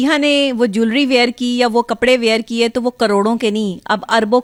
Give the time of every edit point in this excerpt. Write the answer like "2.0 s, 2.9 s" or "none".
none